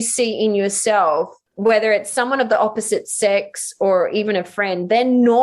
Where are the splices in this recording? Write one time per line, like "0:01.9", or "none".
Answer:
0:01.4